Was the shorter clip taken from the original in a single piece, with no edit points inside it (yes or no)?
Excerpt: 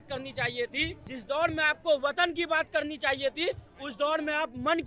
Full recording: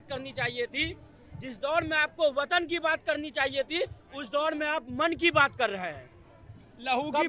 no